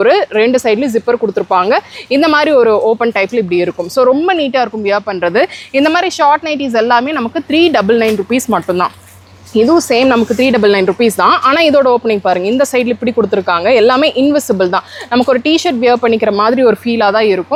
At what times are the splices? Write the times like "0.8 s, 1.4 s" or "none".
none